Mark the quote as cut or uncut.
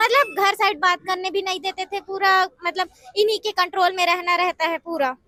uncut